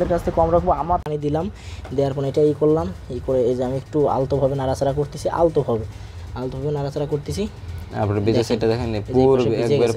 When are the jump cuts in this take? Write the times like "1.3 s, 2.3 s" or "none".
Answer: 1.1 s